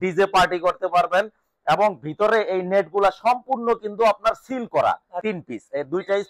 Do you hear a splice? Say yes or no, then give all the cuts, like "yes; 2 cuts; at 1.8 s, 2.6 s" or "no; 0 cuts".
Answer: yes; 1 cut; at 5.2 s